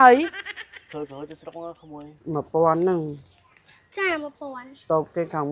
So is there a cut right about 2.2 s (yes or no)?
yes